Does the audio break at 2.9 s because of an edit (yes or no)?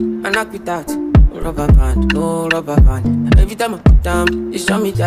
no